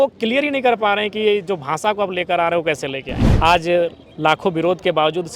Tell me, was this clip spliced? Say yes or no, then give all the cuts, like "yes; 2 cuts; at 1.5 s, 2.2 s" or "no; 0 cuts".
yes; 1 cut; at 3.2 s